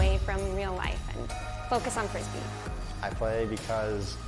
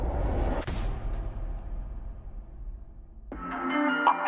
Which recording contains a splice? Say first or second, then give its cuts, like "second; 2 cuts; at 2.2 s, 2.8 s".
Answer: second; 1 cut; at 3.2 s